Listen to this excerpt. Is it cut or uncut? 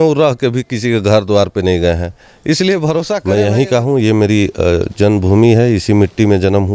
cut